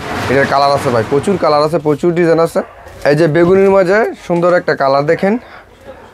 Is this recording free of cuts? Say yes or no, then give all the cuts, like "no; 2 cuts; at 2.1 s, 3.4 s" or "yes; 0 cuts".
no; 1 cut; at 2.8 s